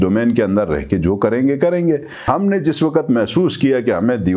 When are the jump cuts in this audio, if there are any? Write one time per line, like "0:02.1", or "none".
0:02.2

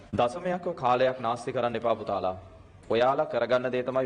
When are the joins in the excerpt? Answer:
none

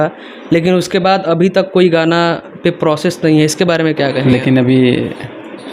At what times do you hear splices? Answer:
0:04.2

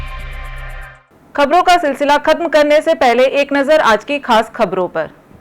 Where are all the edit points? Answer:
none

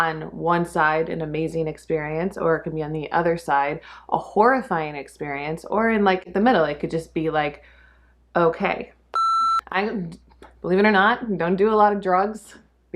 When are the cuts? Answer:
0:09.4

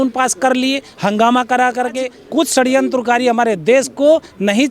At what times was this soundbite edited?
0:02.1

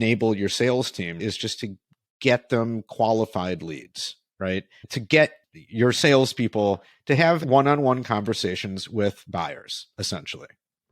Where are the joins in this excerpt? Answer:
0:01.2
0:05.3
0:07.4

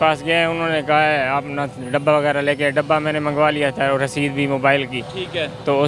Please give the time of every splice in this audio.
none

